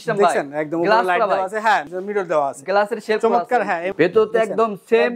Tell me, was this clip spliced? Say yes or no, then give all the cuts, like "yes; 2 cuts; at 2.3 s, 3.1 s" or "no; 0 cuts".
yes; 2 cuts; at 1.9 s, 3.9 s